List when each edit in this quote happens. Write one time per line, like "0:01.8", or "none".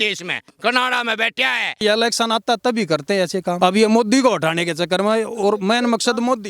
0:01.8
0:03.6